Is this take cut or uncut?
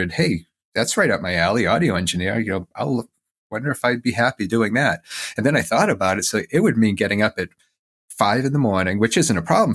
uncut